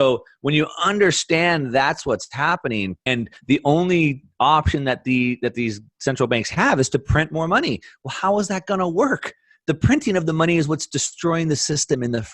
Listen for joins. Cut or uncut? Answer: cut